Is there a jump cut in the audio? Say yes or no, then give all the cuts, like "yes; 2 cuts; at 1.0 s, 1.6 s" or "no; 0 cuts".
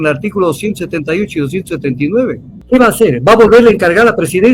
yes; 1 cut; at 2.5 s